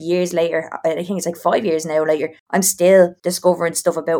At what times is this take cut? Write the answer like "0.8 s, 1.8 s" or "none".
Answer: 2.4 s, 3.2 s